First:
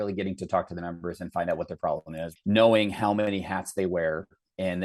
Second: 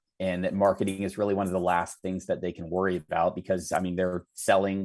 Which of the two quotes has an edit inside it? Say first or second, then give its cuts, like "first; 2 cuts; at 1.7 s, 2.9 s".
first; 1 cut; at 2.2 s